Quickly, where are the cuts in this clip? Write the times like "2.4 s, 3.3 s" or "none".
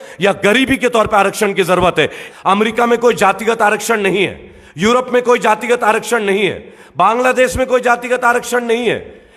2.2 s